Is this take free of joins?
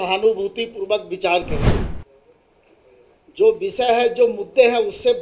no; 1 cut; at 1.8 s

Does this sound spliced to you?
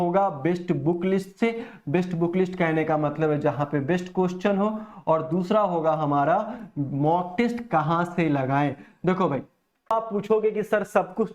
yes; 1 cut; at 9.9 s

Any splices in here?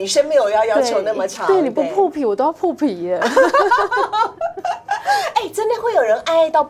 no; 0 cuts

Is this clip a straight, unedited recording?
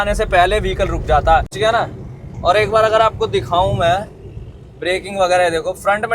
no; 1 cut; at 1.5 s

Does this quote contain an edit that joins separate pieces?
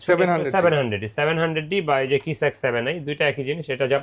no; 0 cuts

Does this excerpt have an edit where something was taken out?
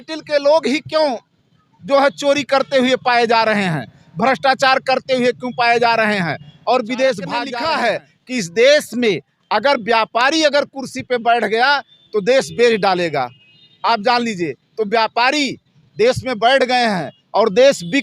yes; 1 cut; at 7.5 s

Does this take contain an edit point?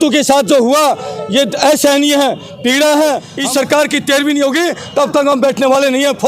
yes; 1 cut; at 3.3 s

